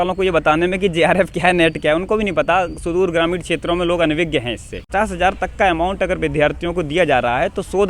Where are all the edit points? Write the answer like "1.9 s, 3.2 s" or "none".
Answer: 4.8 s

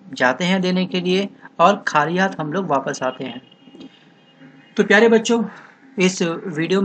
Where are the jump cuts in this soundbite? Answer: 5.9 s

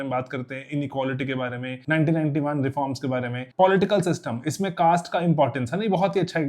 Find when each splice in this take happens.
1.7 s, 3.4 s

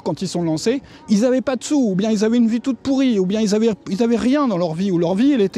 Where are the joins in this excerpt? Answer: 0.9 s

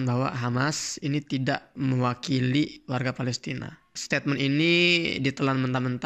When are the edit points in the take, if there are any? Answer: 1.7 s, 4.0 s

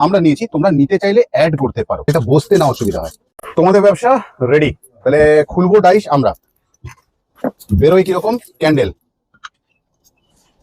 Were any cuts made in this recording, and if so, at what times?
2.1 s

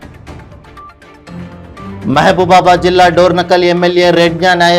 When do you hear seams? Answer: 1.1 s

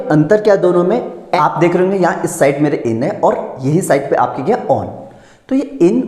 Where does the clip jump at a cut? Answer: 1.3 s

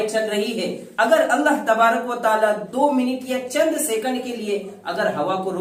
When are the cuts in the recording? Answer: none

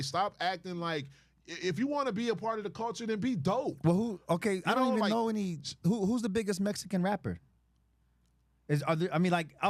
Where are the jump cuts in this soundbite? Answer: none

